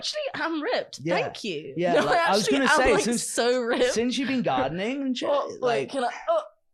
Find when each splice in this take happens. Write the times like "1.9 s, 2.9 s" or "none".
none